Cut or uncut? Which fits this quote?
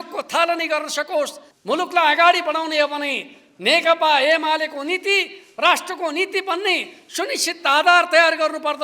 cut